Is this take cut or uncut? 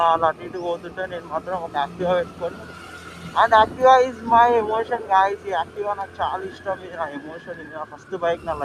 uncut